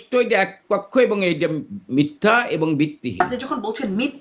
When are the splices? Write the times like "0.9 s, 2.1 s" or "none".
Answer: 3.2 s